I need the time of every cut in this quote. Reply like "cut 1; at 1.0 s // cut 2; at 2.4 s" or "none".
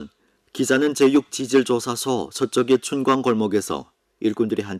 cut 1; at 1.6 s